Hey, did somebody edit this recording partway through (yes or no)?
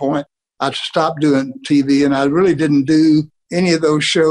no